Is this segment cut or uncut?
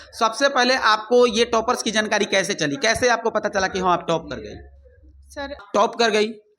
cut